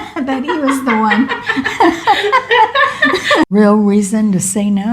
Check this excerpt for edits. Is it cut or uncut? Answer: cut